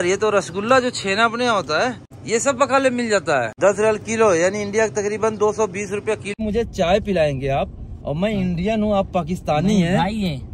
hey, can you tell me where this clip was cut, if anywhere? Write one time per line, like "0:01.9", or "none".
0:02.1
0:03.5
0:06.3